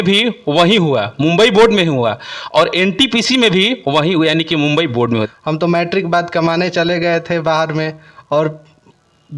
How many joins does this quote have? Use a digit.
1